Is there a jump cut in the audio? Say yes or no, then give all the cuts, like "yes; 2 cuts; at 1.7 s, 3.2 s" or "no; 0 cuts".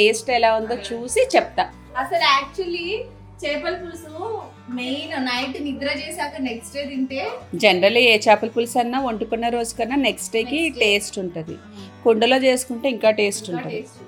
no; 0 cuts